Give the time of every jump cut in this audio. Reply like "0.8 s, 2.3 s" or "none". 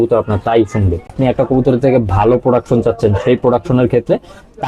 1.1 s